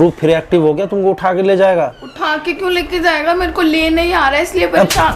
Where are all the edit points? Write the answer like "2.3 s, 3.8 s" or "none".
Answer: none

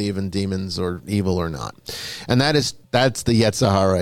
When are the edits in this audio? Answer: 2.8 s

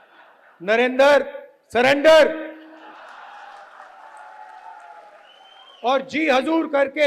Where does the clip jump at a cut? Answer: 2.9 s

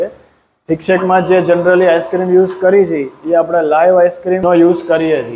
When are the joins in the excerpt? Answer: 4.4 s

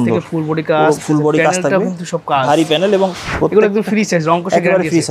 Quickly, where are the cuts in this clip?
3.2 s

